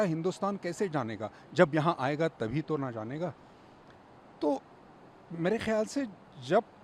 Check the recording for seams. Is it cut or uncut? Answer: uncut